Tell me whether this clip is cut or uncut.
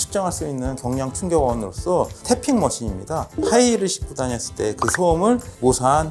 uncut